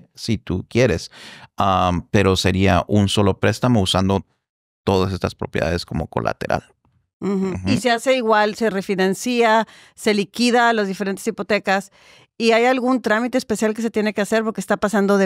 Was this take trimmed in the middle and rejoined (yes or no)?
no